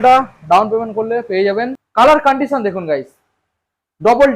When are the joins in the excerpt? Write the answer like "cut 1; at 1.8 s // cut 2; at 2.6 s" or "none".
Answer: cut 1; at 1.8 s